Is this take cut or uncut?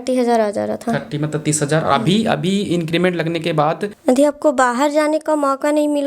cut